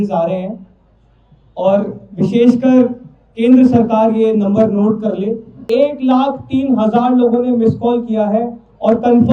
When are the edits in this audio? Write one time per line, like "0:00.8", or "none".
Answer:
0:05.6

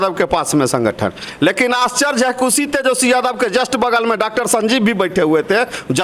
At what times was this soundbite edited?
none

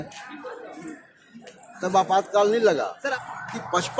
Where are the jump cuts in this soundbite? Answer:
0:03.1

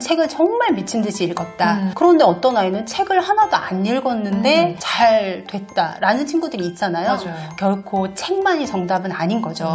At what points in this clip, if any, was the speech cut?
0:01.9

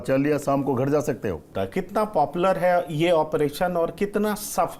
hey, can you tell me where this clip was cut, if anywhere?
0:01.5

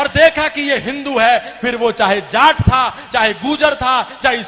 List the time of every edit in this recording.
none

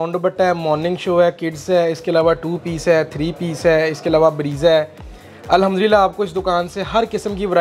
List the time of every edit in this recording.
none

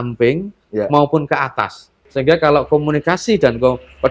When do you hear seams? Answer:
0:02.0

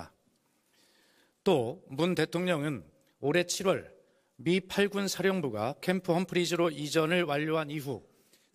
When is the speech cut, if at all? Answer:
none

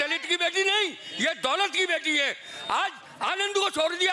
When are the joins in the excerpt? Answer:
none

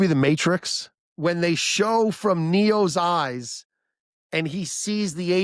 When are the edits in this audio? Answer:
0:01.0

